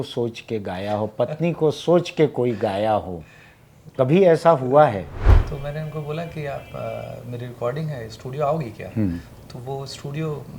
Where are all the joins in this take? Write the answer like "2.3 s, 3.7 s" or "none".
5.3 s

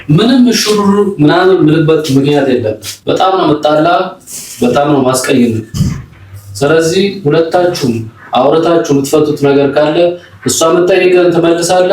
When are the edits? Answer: 2.9 s

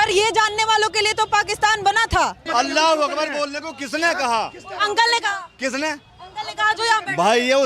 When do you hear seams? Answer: 2.4 s

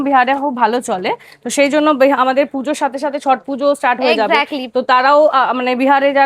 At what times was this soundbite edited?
none

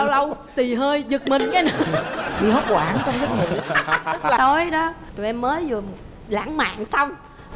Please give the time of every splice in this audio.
4.4 s

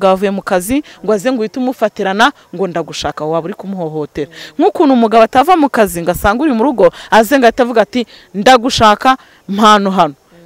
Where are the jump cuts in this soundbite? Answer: none

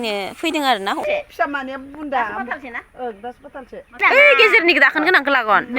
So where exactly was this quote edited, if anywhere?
1.0 s, 3.9 s

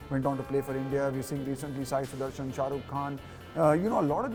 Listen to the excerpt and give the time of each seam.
none

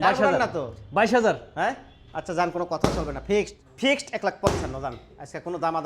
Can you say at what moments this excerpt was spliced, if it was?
3.6 s

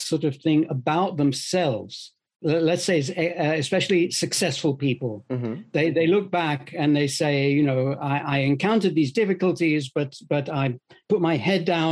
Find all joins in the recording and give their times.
none

